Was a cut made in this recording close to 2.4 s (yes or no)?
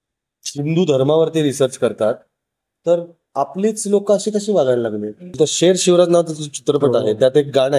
no